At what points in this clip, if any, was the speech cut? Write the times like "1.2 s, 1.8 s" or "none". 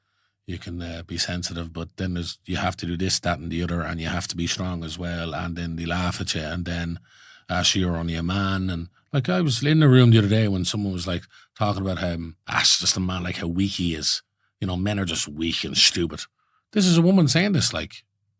12.4 s